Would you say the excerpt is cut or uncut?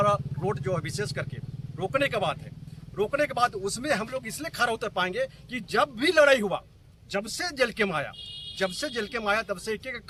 uncut